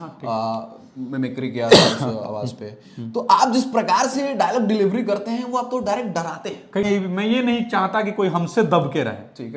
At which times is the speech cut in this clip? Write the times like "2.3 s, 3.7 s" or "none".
6.8 s